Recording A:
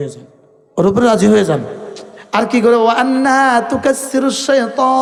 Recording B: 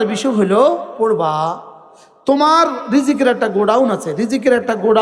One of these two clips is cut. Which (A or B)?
B